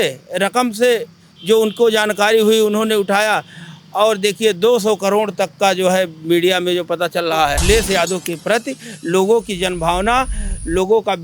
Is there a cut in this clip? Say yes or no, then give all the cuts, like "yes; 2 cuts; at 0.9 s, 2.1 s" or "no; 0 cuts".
yes; 1 cut; at 7.6 s